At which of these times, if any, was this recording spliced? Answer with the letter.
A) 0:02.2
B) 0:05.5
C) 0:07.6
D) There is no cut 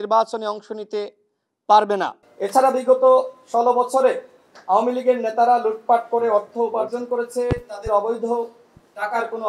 A